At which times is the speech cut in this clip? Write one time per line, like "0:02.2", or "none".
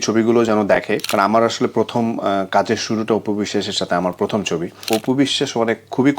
0:01.0
0:04.8